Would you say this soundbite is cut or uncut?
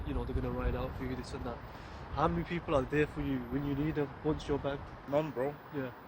cut